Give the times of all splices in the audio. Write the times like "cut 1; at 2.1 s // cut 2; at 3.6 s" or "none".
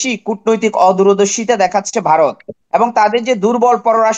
cut 1; at 2.5 s